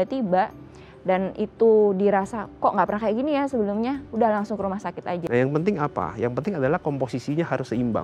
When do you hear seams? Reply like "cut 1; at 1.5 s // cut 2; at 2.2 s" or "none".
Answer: cut 1; at 5.2 s